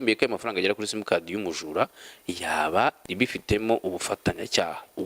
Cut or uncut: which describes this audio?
cut